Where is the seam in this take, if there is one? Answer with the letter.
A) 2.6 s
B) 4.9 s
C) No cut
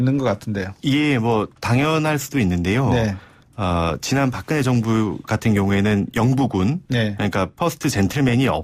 C